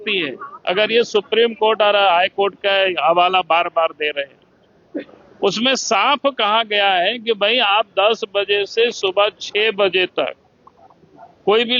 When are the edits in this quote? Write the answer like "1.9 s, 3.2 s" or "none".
none